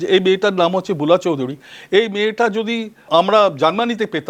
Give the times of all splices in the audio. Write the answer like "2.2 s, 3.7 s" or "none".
3.1 s